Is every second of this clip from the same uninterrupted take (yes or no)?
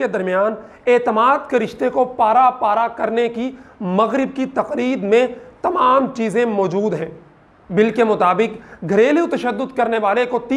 yes